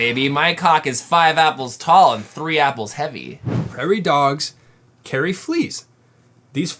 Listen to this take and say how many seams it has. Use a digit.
1